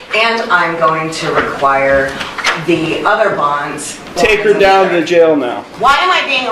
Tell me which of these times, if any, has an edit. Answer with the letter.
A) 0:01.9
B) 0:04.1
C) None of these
B